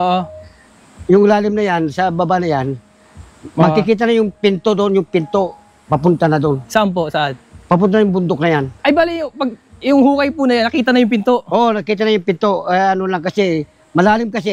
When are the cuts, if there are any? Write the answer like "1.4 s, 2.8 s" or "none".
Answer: none